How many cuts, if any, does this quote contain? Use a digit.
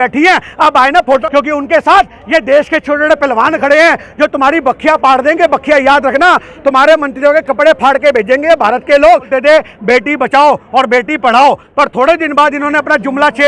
2